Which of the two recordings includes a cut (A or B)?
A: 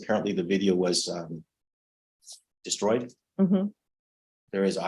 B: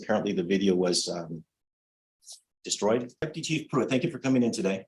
B